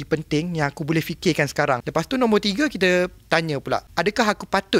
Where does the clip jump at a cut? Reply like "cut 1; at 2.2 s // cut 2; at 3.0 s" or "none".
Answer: cut 1; at 1.8 s // cut 2; at 3.9 s